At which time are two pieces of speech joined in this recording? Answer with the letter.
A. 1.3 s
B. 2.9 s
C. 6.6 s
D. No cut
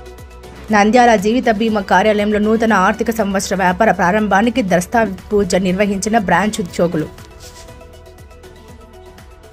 D